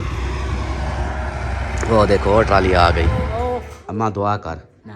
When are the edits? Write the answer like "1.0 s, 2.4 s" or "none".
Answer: 3.3 s

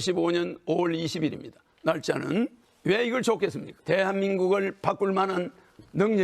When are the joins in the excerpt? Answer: 2.7 s, 3.7 s

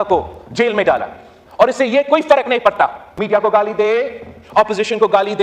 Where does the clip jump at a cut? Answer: 3.1 s

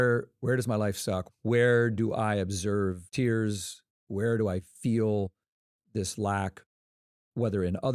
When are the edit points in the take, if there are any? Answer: 1.2 s, 3.0 s

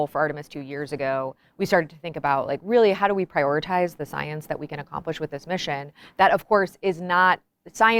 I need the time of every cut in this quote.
none

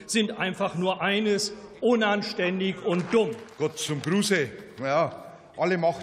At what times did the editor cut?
3.4 s

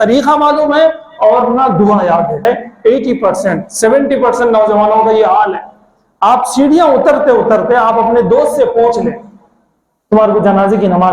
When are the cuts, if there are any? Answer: 2.4 s

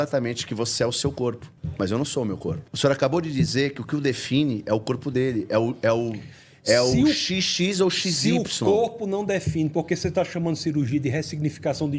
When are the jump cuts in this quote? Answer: none

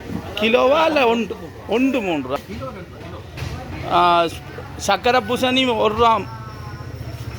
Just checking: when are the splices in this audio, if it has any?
2.4 s

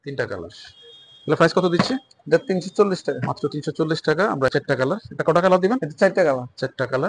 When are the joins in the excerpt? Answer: 4.5 s

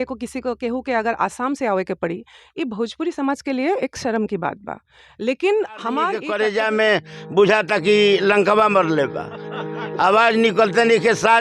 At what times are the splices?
6.2 s

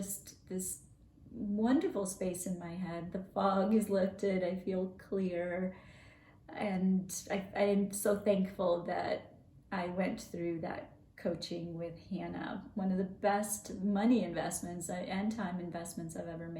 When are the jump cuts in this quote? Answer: none

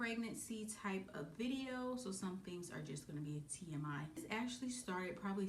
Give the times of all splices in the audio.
none

